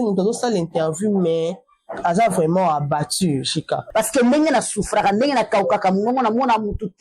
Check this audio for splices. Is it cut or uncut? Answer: cut